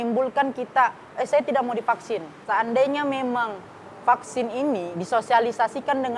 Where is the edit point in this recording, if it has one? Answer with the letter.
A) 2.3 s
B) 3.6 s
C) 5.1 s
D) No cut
A